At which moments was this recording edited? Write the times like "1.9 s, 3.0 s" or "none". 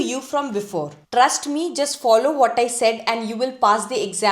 1.0 s